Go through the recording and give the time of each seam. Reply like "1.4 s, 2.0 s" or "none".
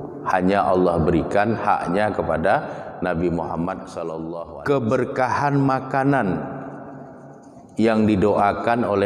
4.2 s

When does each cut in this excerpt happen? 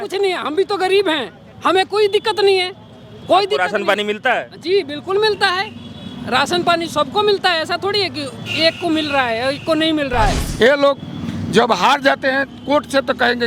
10.4 s

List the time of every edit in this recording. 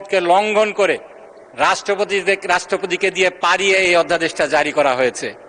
none

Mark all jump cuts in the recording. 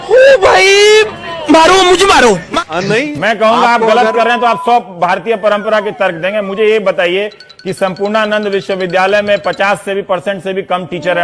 2.5 s

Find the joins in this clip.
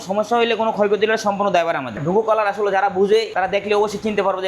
2.0 s, 3.3 s

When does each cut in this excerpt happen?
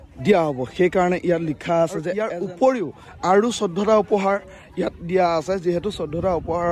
2.3 s

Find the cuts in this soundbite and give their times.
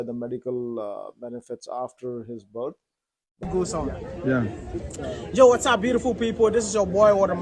3.5 s

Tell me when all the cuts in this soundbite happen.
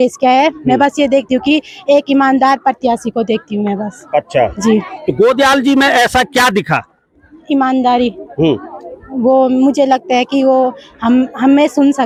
none

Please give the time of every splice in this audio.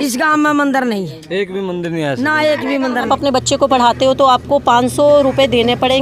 3.1 s

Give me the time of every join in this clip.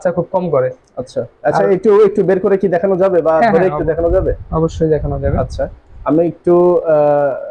none

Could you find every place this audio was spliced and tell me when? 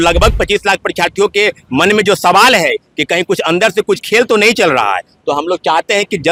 none

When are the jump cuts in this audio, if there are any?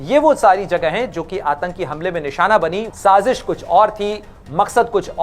2.8 s

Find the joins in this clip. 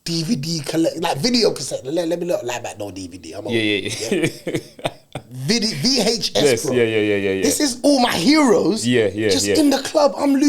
none

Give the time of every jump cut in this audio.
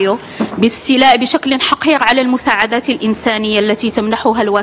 none

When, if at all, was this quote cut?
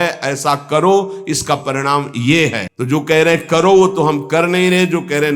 2.7 s

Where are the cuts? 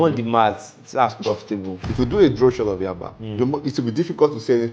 1.8 s

